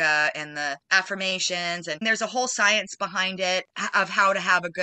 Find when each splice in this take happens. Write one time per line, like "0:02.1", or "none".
0:00.8
0:02.0
0:03.7